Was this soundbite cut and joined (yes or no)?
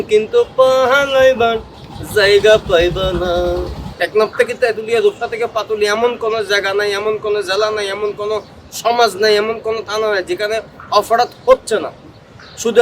yes